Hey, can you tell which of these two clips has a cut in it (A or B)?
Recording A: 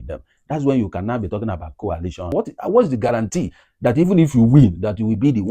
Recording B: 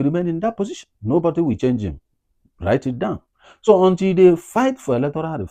A